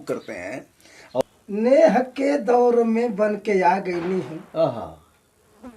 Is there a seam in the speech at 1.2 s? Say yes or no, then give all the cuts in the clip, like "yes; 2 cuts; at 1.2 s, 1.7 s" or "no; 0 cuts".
yes; 1 cut; at 1.2 s